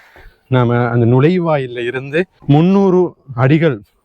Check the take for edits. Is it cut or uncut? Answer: cut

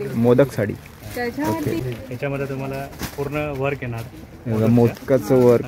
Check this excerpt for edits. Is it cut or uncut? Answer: uncut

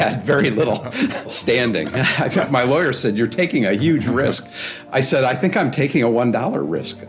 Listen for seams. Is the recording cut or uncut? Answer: cut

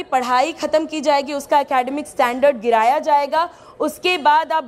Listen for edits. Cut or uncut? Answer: uncut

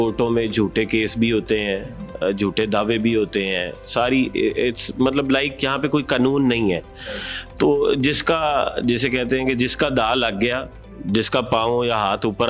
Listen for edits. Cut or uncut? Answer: uncut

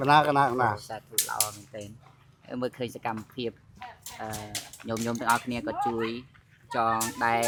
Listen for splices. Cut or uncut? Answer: uncut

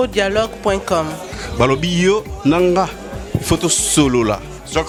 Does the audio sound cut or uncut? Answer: uncut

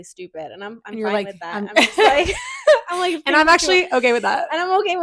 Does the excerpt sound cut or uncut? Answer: uncut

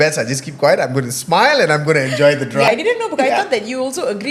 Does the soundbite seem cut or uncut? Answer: cut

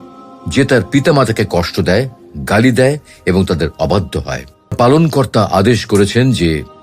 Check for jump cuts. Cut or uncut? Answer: cut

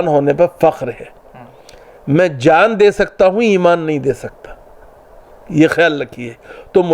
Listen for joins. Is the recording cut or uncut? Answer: uncut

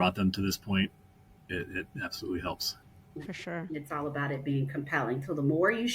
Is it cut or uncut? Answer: cut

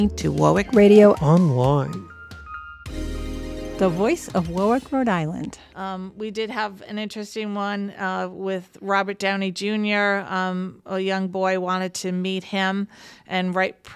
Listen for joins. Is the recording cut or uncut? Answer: cut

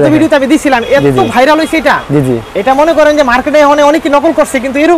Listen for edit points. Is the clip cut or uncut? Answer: uncut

